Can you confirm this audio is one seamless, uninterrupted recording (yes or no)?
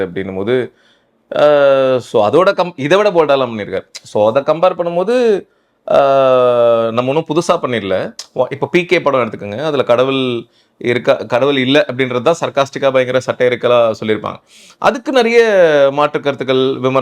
no